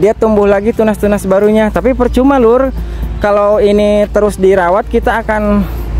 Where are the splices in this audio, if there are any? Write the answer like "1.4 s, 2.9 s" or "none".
none